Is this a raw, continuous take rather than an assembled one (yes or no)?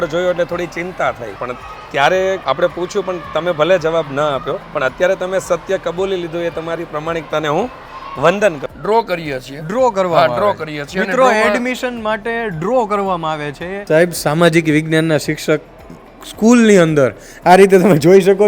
no